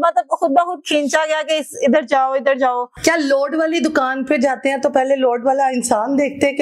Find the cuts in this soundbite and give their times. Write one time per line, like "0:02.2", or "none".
none